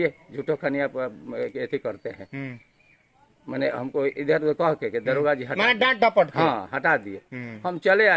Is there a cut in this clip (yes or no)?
no